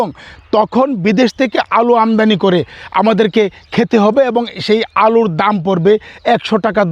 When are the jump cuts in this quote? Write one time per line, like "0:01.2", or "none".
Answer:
none